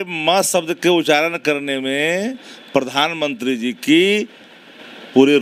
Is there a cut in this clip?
no; 0 cuts

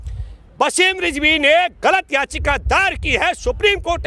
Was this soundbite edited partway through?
no; 0 cuts

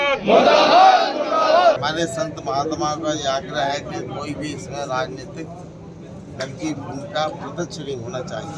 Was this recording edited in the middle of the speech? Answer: yes; 1 cut; at 1.8 s

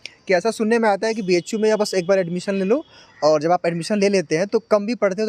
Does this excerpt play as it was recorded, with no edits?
yes; 0 cuts

